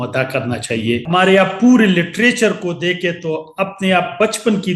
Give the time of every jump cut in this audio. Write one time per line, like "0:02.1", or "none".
0:01.0